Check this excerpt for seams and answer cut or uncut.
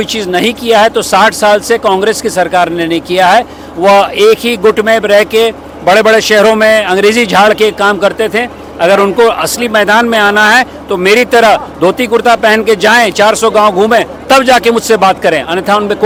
uncut